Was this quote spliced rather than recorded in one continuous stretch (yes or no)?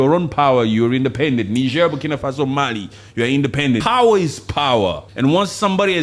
yes